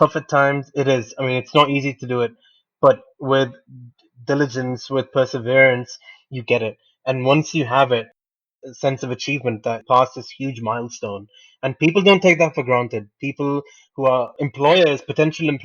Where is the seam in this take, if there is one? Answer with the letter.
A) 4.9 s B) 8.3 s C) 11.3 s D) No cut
B